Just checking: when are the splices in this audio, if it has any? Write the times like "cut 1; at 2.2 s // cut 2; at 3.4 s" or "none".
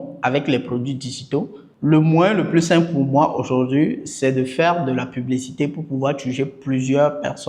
cut 1; at 1.6 s